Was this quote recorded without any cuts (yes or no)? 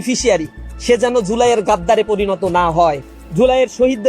no